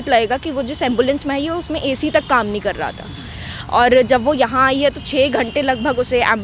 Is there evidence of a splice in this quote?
no; 0 cuts

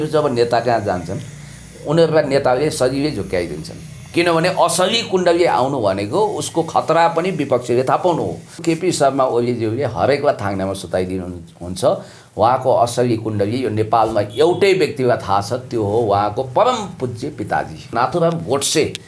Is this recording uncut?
no; 2 cuts; at 8.6 s, 17.9 s

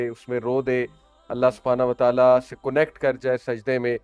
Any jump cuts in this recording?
no; 0 cuts

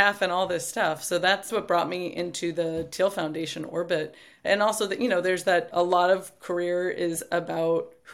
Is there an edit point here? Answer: no; 0 cuts

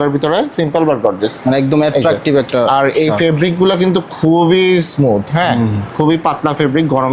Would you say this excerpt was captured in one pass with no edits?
yes; 0 cuts

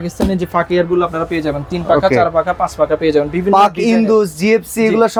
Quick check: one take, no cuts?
yes; 0 cuts

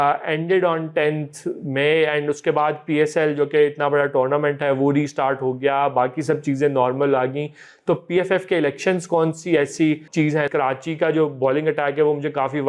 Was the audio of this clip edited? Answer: yes; 1 cut; at 10.3 s

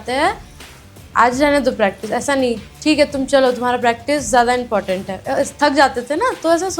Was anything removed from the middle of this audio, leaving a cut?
yes; 1 cut; at 5.1 s

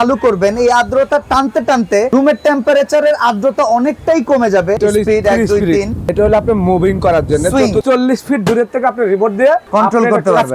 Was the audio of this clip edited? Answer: yes; 5 cuts; at 2.1 s, 4.8 s, 6.1 s, 7.8 s, 9.6 s

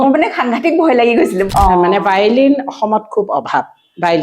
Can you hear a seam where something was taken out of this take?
yes; 1 cut; at 1.5 s

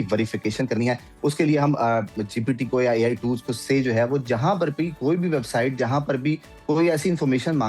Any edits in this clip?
no; 0 cuts

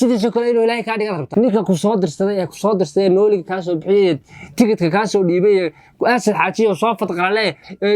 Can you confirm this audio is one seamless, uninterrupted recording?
no; 1 cut; at 1.2 s

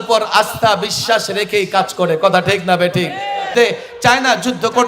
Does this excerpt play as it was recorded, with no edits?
no; 1 cut; at 3.5 s

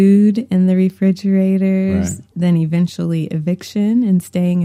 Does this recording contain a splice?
yes; 1 cut; at 2.2 s

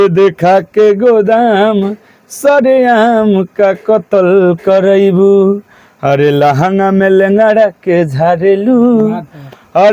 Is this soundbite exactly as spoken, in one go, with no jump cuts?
yes; 0 cuts

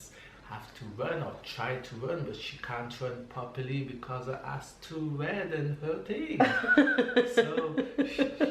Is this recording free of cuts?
yes; 0 cuts

